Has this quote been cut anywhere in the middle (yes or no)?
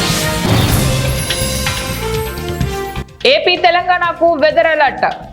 yes